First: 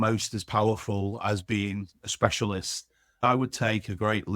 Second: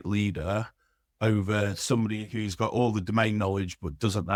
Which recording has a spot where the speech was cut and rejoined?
first; 1 cut; at 3.2 s

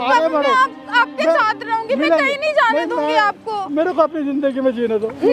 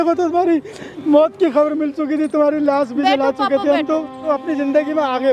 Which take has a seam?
second; 1 cut; at 4.3 s

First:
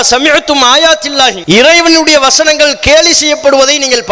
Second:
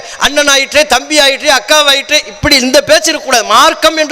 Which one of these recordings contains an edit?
first; 1 cut; at 1.4 s

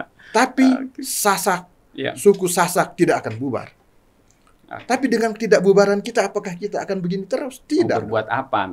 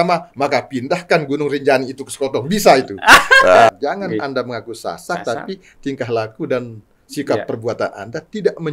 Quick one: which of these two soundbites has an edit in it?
second; 1 cut; at 3.7 s

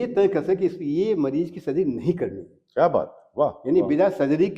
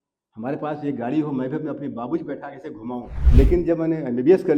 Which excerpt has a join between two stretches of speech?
second; 1 cut; at 3.2 s

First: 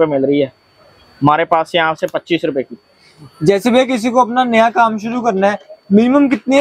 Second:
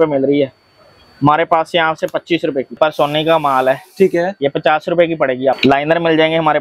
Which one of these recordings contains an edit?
second; 2 cuts; at 2.8 s, 5.6 s

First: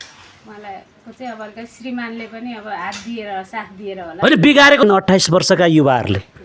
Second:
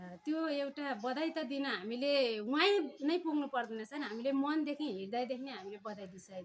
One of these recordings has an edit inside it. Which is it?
first; 1 cut; at 4.8 s

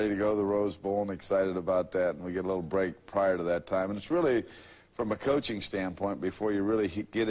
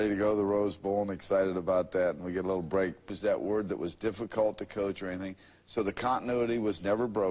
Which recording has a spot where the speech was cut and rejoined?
first; 1 cut; at 3.1 s

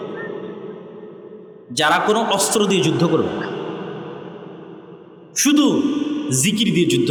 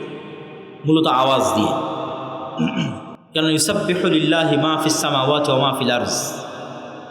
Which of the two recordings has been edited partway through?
second; 1 cut; at 3.1 s

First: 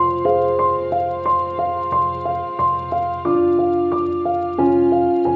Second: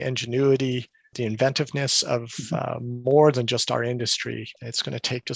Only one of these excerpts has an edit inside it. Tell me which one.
second; 2 cuts; at 1.1 s, 4.5 s

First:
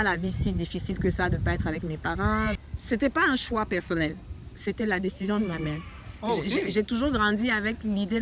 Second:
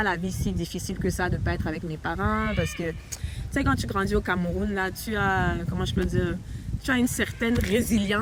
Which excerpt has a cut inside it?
first; 1 cut; at 2.5 s

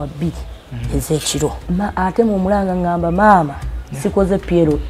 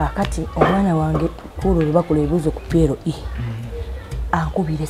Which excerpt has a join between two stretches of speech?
first; 1 cut; at 1.6 s

